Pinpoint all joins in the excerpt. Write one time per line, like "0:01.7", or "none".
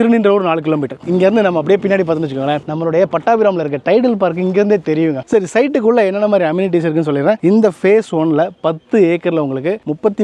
0:01.0
0:05.3